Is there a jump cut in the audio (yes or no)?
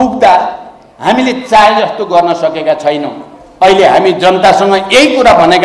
no